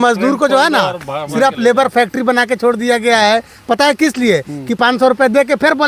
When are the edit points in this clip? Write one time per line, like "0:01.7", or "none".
none